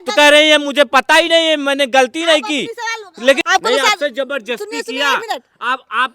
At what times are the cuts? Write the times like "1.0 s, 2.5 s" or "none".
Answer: 3.4 s